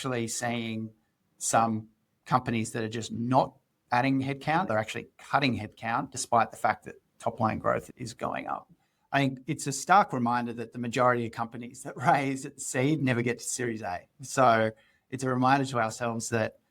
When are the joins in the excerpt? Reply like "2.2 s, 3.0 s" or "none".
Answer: 4.7 s, 8.7 s